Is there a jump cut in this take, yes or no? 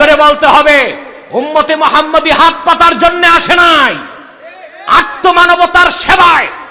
no